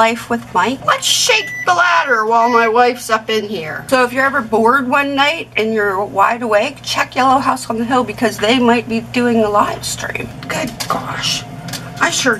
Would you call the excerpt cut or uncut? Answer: cut